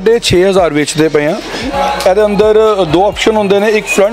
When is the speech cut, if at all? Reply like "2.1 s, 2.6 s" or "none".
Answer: 1.7 s